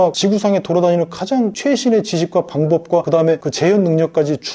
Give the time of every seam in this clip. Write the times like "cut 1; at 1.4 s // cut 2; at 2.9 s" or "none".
none